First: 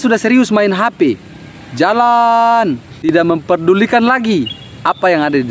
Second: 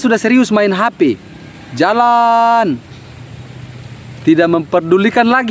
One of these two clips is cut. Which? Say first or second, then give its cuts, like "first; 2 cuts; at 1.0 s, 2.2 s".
first; 1 cut; at 2.9 s